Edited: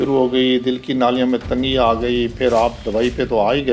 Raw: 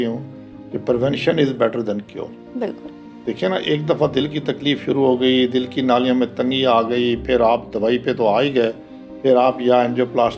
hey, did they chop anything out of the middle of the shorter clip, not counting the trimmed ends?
no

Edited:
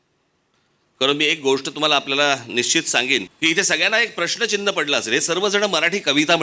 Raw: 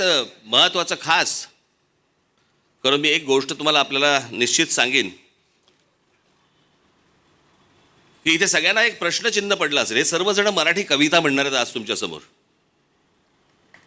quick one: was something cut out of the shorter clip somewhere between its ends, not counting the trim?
yes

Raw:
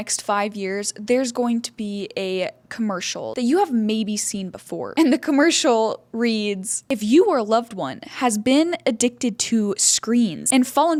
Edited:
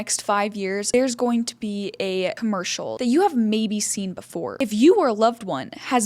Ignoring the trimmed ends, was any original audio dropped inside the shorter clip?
yes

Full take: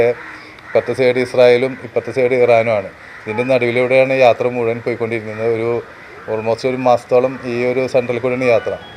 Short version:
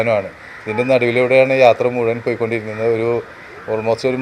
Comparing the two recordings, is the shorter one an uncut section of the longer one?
yes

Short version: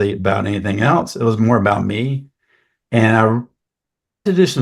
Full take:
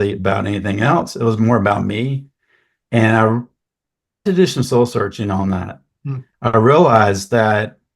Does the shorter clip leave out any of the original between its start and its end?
no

